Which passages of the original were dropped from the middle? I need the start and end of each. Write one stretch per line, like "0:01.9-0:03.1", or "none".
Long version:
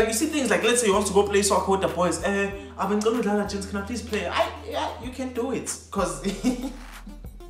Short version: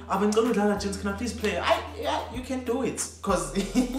none